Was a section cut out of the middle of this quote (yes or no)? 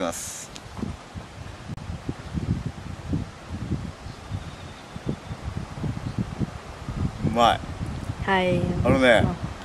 yes